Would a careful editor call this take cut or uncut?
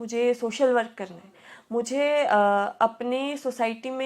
uncut